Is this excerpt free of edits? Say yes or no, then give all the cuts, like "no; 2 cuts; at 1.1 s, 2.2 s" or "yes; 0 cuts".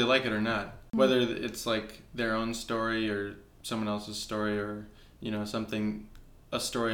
no; 1 cut; at 0.9 s